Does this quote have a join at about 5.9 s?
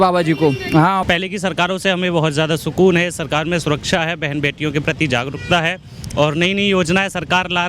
no; 1 cut; at 1.0 s

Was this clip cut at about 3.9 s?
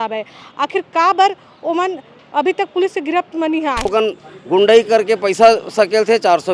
yes; 1 cut; at 3.9 s

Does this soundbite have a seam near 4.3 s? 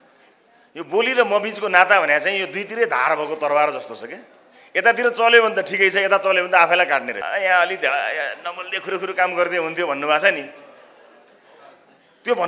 no; 1 cut; at 7.2 s

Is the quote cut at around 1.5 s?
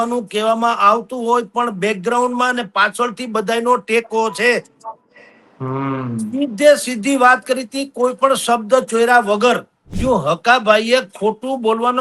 no; 1 cut; at 9.9 s

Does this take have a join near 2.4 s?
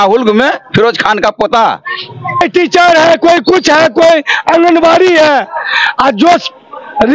yes; 1 cut; at 2.4 s

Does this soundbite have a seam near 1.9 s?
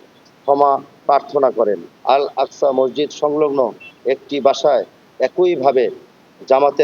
yes; 1 cut; at 1.9 s

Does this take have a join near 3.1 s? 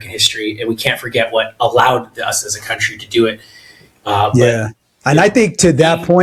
no; 0 cuts

